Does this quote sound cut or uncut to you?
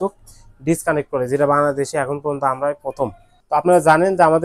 cut